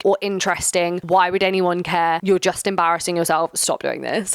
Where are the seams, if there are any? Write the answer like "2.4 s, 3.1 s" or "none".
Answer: 1.0 s, 2.2 s